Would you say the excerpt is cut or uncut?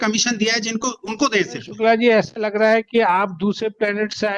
cut